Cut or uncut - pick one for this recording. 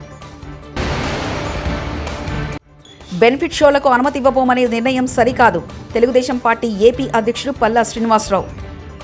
uncut